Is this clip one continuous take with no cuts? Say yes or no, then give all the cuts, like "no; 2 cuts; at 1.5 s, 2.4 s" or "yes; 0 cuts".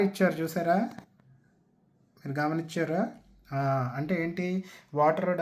yes; 0 cuts